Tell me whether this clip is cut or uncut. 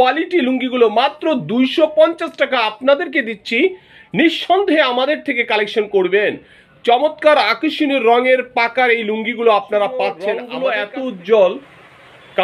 cut